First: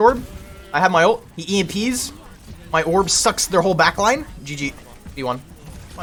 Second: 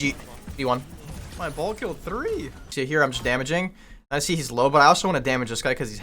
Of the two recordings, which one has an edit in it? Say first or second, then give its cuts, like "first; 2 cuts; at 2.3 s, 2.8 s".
second; 1 cut; at 2.7 s